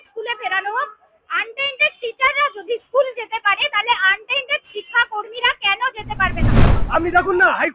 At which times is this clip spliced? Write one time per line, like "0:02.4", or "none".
0:06.8